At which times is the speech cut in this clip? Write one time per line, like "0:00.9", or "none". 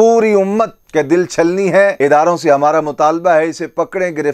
0:01.9